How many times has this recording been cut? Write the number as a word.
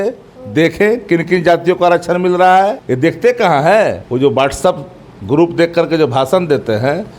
two